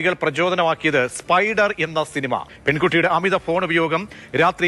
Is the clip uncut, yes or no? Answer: no